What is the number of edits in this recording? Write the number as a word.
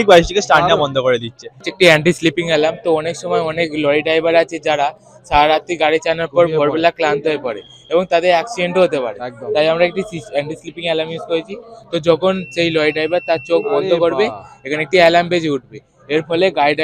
zero